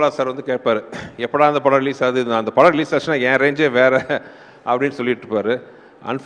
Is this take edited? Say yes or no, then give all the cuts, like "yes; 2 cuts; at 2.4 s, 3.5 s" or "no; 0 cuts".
no; 0 cuts